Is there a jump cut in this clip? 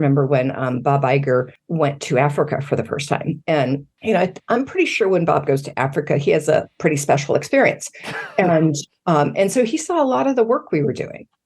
yes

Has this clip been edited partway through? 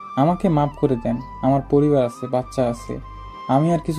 no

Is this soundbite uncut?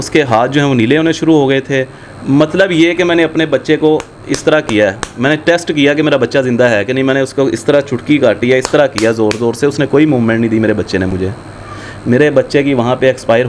yes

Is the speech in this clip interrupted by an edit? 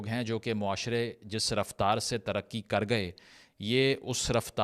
no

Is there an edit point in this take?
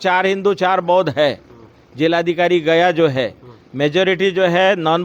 no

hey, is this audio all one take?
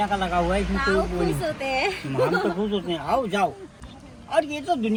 yes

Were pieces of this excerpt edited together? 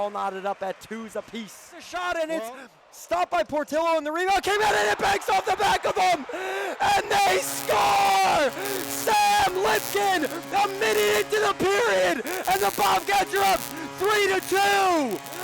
yes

